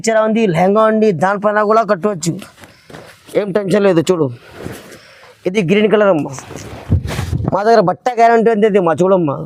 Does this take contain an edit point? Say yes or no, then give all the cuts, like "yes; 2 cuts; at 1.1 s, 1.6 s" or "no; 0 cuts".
no; 0 cuts